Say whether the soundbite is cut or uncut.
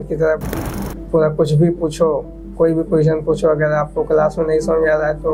uncut